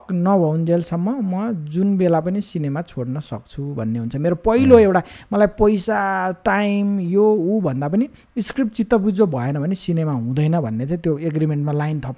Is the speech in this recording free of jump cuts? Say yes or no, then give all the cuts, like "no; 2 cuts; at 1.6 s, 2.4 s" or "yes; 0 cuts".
yes; 0 cuts